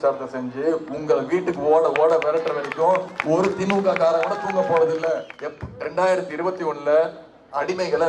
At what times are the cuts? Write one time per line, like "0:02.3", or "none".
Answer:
0:05.3